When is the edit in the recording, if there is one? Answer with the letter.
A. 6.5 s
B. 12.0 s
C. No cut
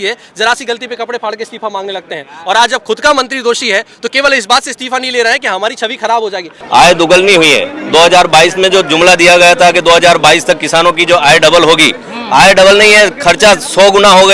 A